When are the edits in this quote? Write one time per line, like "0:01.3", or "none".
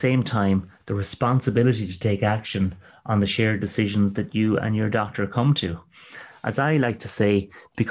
none